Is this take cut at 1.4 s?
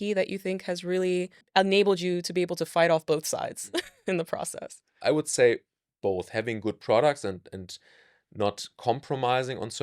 yes; 2 cuts; at 1.4 s, 4.8 s

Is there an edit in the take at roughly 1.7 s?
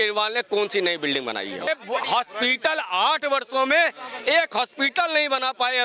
yes; 1 cut; at 1.7 s

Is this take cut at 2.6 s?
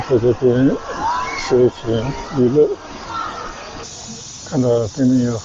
no; 1 cut; at 3.8 s

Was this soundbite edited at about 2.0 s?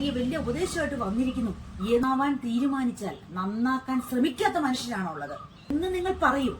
yes; 2 cuts; at 2.0 s, 5.7 s

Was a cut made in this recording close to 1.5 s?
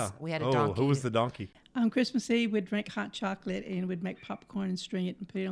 yes; 1 cut; at 1.5 s

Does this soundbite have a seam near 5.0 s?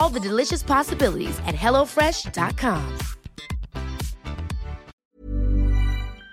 yes; 1 cut; at 5.0 s

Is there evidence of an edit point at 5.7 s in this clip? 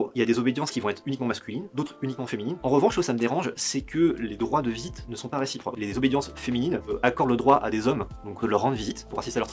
yes; 4 cuts; at 2.6 s, 5.7 s, 6.9 s, 8.4 s

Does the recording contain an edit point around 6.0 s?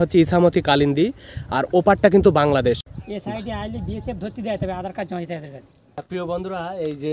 yes; 2 cuts; at 2.9 s, 6.0 s

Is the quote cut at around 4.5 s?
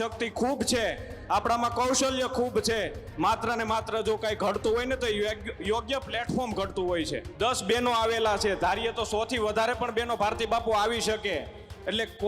no; 1 cut; at 7.2 s

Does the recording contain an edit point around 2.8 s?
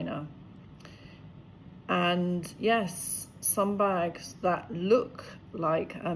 no; 0 cuts

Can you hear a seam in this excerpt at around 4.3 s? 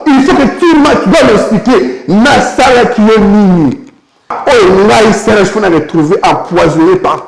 yes; 1 cut; at 4.3 s

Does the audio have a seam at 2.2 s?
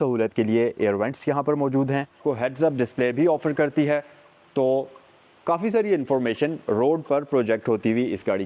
yes; 1 cut; at 2.2 s

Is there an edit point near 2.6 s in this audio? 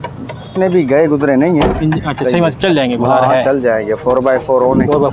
no; 0 cuts

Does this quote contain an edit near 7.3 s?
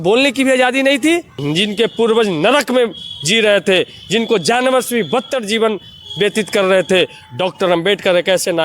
no; 1 cut; at 1.4 s

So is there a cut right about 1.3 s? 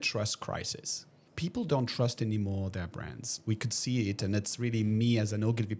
yes; 1 cut; at 1.3 s

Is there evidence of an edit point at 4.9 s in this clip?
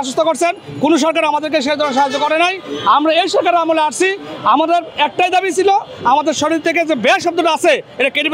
no; 0 cuts

